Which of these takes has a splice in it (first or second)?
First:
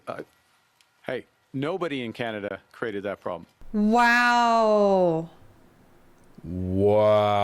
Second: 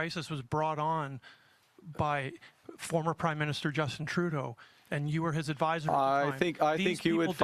first